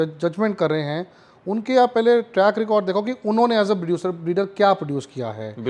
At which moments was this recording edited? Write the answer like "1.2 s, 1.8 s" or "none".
none